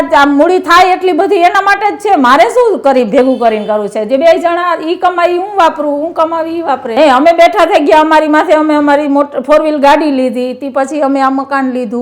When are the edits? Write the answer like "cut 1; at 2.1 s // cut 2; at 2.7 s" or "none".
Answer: cut 1; at 6.9 s